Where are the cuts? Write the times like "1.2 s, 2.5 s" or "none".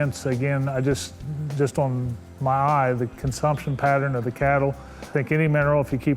5.1 s